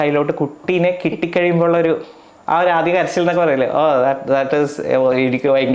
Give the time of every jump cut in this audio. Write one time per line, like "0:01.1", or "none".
none